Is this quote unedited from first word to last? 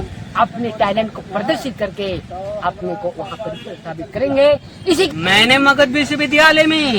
no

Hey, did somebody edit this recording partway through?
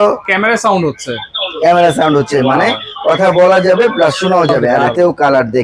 yes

